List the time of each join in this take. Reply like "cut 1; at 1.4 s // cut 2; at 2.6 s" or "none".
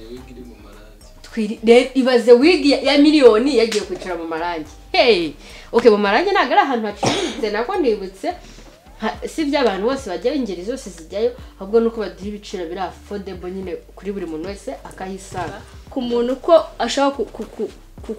cut 1; at 15.8 s